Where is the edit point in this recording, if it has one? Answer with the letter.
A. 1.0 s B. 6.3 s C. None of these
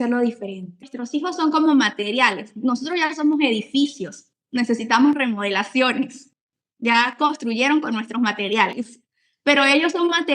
A